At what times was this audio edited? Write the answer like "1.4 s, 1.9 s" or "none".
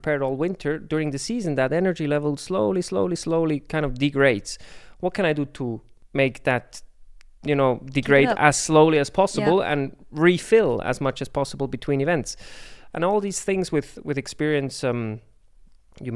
5.9 s

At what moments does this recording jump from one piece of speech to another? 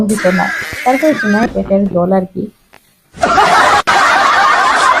1.4 s

